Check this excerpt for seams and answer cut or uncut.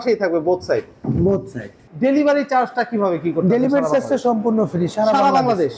cut